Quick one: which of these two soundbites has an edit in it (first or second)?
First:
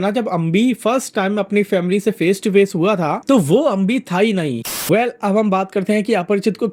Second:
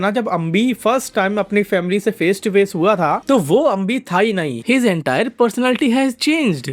first